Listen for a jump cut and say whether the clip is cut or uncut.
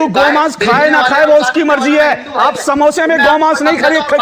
uncut